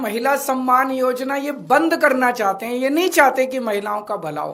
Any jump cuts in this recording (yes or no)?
no